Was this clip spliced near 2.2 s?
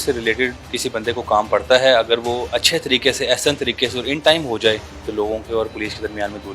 no; 1 cut; at 5.0 s

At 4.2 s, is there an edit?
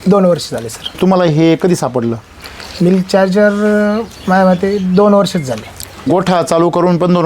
no; 2 cuts; at 0.9 s, 6.1 s

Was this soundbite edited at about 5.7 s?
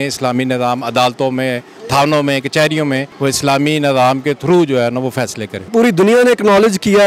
yes; 2 cuts; at 3.1 s, 5.7 s

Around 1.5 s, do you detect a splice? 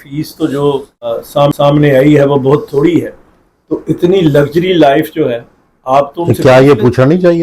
yes; 1 cut; at 1.5 s

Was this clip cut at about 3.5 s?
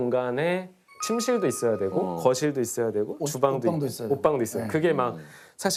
no; 0 cuts

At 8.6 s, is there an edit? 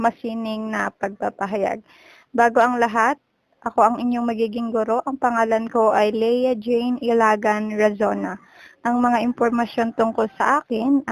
no; 0 cuts

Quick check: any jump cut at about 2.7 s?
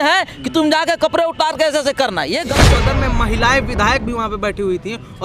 yes; 1 cut; at 2.7 s

